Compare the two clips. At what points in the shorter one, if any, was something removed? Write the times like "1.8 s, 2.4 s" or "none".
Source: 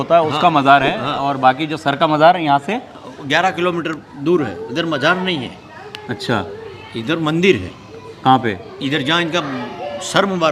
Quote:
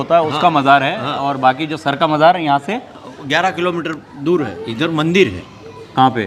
4.6 s

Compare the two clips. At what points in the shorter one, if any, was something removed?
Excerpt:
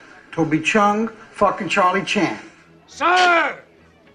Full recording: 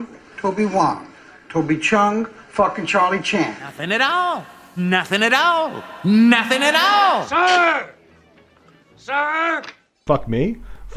2.9 s

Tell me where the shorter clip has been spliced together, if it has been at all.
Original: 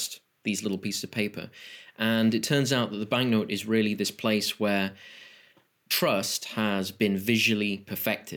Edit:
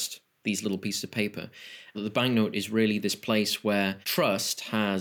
2.0 s, 4.0 s

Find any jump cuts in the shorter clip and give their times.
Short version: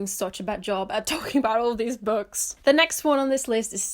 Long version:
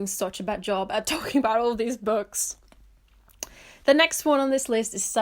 2.4 s

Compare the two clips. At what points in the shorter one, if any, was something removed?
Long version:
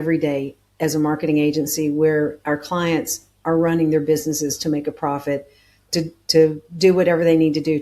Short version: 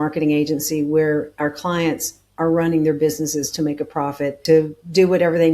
4.4 s

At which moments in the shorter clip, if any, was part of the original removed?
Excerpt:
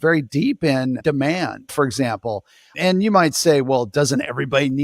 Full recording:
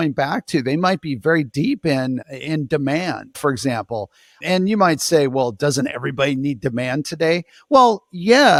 1.0 s

